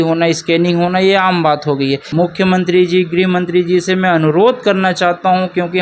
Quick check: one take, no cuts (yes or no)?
no